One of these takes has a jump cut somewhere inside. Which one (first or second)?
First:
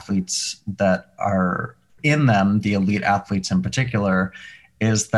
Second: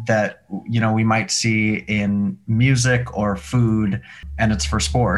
second